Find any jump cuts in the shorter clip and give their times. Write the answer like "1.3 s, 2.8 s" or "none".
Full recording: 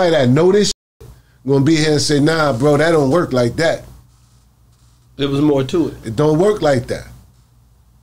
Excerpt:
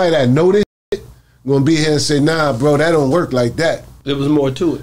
3.9 s